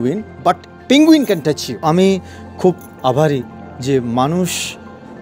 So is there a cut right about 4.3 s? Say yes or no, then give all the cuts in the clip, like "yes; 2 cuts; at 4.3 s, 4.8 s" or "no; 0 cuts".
no; 1 cut; at 1.8 s